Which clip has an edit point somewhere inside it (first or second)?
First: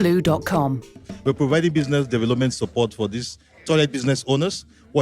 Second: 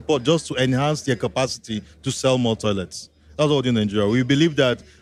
first